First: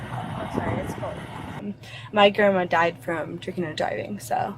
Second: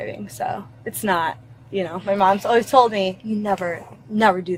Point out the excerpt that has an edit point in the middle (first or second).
first